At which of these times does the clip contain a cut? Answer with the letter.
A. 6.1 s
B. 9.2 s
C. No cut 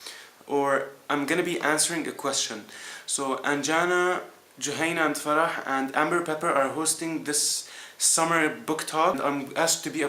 B